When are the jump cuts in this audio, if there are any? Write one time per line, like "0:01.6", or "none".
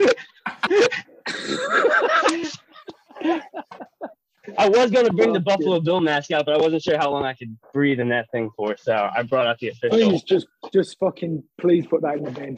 none

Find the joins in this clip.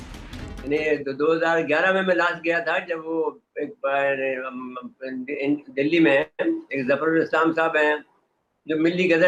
none

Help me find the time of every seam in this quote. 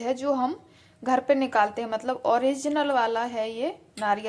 none

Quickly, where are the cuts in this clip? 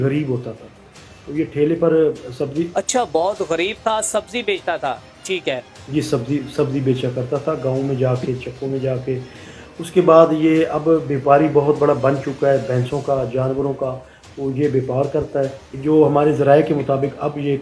0:15.7

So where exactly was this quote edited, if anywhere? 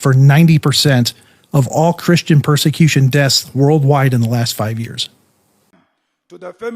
0:05.8

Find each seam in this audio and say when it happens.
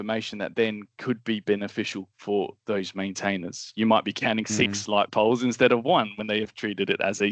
none

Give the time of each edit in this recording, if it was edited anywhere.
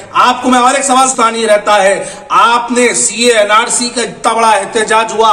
0:01.1

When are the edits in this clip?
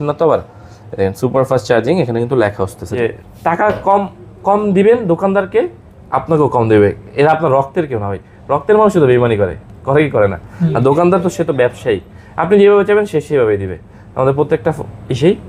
0:02.8

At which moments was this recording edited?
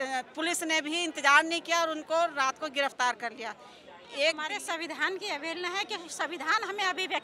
0:04.4

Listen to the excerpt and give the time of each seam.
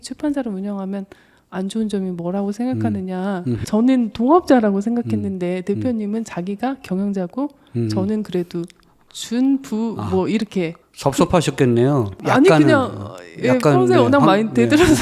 0:03.6
0:10.8

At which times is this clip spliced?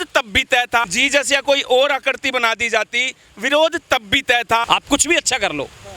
0:00.9
0:04.7

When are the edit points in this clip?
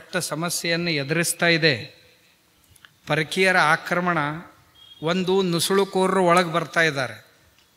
none

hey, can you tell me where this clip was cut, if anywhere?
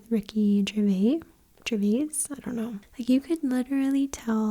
0:02.9

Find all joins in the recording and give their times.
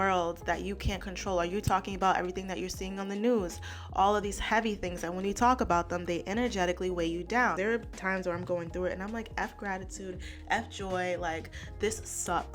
0:07.5

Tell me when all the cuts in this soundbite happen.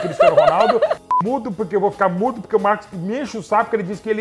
0:01.0

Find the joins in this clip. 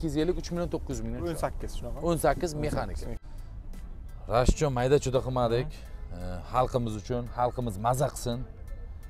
0:03.2

